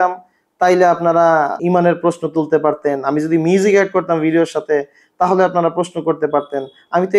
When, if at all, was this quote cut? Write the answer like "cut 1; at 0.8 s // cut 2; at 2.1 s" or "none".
cut 1; at 1.6 s